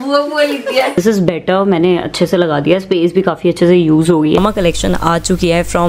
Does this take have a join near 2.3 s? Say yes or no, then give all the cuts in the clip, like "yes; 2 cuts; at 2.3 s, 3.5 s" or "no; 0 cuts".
no; 2 cuts; at 1.0 s, 4.4 s